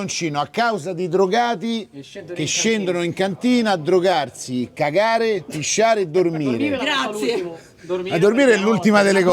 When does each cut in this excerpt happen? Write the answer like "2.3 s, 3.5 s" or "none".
none